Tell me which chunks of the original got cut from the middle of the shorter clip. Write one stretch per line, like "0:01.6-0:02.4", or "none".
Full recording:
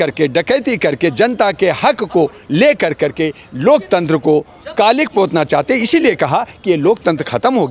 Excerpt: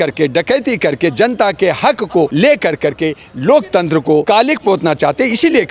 0:02.3-0:02.5
0:04.4-0:04.7